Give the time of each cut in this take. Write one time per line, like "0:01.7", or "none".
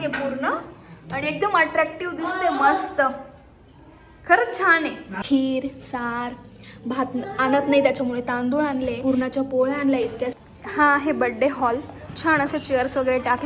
0:05.1
0:09.0
0:10.3